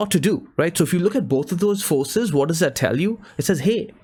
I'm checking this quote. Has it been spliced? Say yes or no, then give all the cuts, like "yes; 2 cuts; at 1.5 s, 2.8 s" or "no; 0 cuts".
no; 0 cuts